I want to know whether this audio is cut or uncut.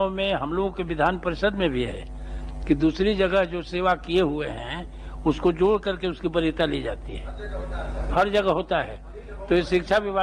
uncut